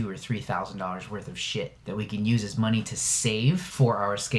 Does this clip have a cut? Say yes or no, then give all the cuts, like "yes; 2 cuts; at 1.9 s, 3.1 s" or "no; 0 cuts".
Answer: yes; 1 cut; at 1.8 s